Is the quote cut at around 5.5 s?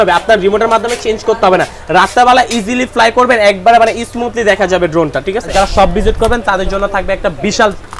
yes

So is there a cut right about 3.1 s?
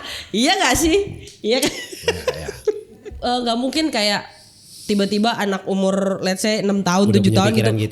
yes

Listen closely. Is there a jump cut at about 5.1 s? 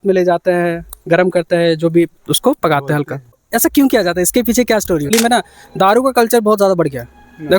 yes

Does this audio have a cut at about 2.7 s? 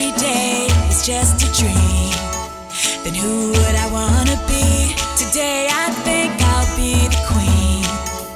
no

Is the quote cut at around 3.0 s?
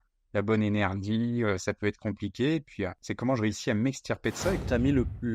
yes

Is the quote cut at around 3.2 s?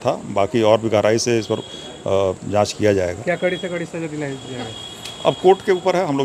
no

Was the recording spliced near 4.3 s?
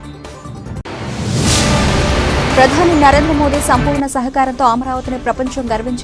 no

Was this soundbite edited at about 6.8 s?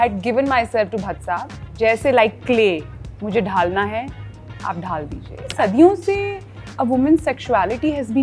no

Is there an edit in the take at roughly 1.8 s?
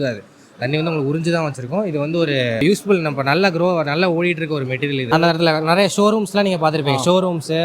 no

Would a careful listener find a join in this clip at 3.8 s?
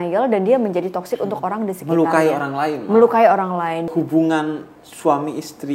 yes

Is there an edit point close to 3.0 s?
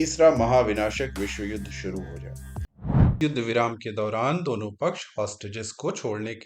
yes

